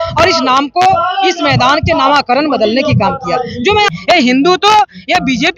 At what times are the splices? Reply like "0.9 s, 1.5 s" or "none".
3.9 s